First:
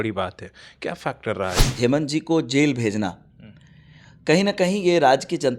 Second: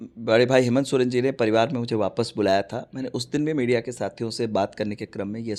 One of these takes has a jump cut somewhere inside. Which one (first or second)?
first